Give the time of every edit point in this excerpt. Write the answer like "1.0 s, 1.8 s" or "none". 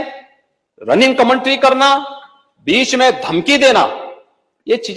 none

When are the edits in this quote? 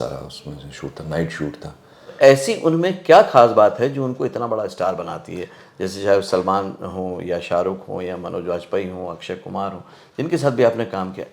2.1 s

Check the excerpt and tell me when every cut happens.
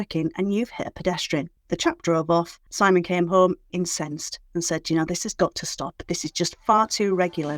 2.6 s, 3.7 s, 5.3 s

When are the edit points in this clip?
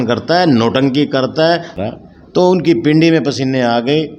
1.8 s

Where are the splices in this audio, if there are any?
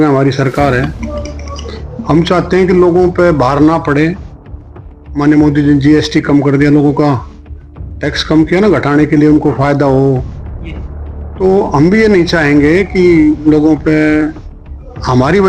none

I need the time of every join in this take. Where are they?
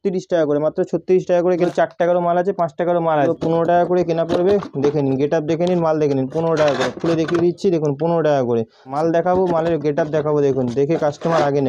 1.6 s, 3.3 s, 8.9 s

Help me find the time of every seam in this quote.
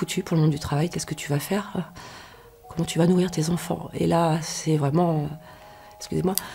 0.9 s

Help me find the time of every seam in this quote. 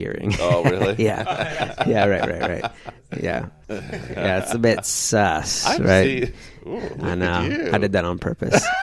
3.6 s

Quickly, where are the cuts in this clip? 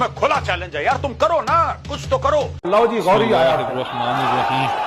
2.6 s

